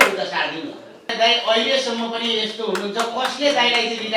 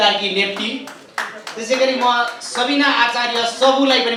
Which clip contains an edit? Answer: first; 1 cut; at 1.1 s

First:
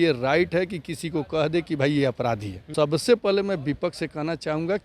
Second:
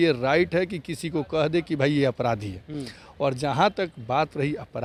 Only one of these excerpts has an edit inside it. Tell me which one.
first; 1 cut; at 2.6 s

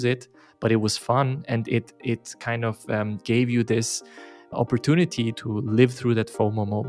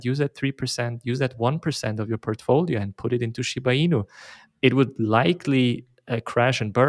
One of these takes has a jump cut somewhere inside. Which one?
first; 2 cuts; at 4.4 s, 5.4 s

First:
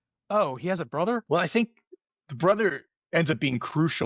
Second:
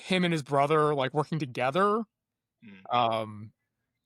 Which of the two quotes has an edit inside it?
first; 1 cut; at 1.2 s

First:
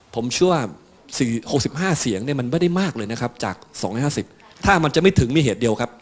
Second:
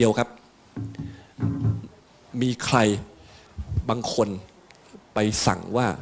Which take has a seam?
first; 2 cuts; at 1.0 s, 4.4 s

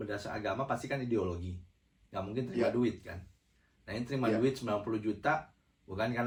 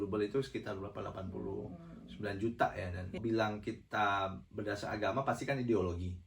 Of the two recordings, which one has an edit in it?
second; 1 cut; at 3.2 s

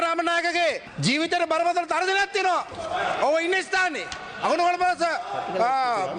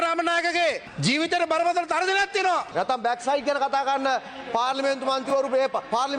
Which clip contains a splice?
second; 1 cut; at 2.7 s

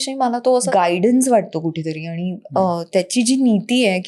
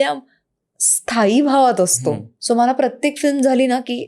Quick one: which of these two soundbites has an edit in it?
second; 1 cut; at 2.3 s

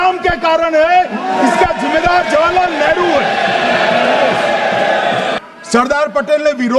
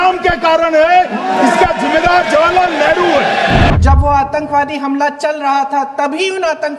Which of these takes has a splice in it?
second; 1 cut; at 3.7 s

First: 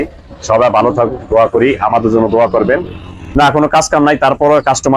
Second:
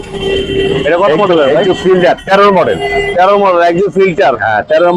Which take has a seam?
first; 1 cut; at 3.3 s

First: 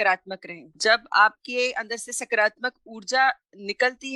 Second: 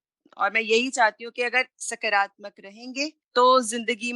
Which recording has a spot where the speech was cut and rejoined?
second; 1 cut; at 3.2 s

